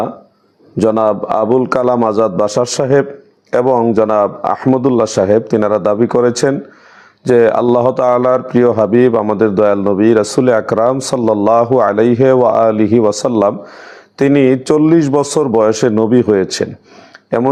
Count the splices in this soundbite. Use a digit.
0